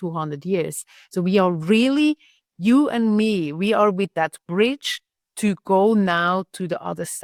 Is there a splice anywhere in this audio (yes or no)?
no